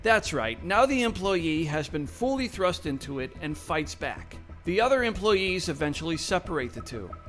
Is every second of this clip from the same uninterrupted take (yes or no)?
no